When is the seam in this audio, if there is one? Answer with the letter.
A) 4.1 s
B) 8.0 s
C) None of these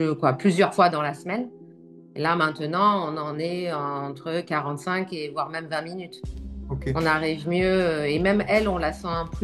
C